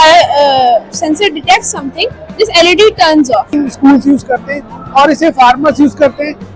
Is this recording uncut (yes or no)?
no